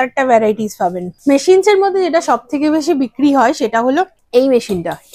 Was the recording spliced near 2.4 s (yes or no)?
no